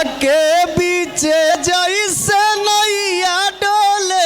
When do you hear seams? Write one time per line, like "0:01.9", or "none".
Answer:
0:01.5